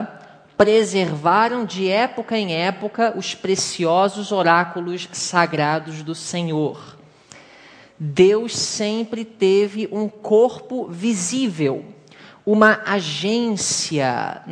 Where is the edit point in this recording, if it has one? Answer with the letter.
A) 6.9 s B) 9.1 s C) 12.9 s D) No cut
B